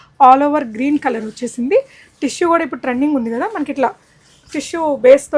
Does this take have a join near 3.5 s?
no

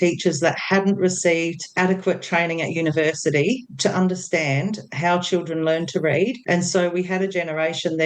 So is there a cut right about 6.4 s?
yes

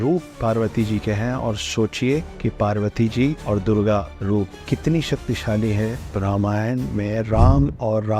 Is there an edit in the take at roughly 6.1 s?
yes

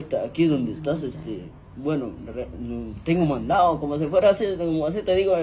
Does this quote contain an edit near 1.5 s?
no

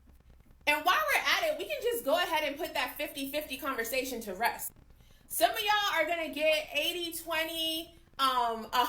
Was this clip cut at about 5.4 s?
no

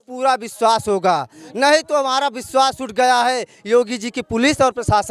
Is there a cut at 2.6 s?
no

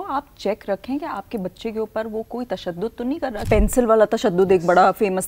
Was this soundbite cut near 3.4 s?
yes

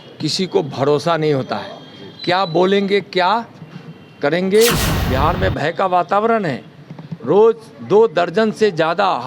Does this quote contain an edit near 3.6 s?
no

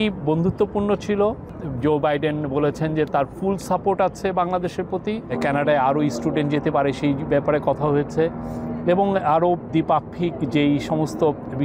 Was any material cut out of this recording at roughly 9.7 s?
yes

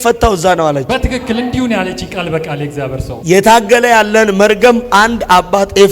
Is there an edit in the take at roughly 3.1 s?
yes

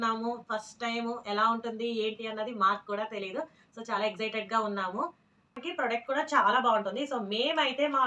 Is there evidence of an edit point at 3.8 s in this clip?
no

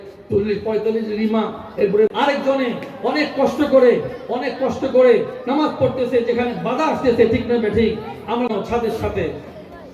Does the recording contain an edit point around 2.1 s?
yes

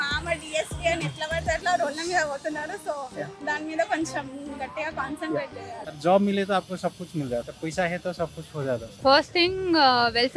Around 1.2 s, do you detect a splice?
no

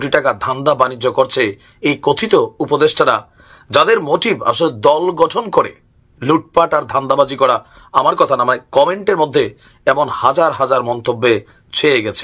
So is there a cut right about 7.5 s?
no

